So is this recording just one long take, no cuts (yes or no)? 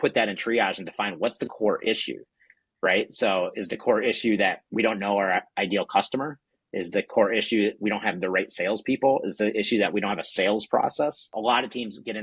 no